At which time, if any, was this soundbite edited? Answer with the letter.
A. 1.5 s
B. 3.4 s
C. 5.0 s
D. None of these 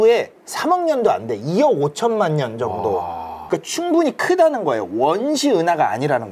B